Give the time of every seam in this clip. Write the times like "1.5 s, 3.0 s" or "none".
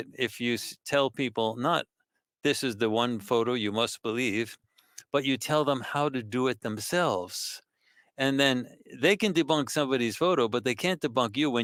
none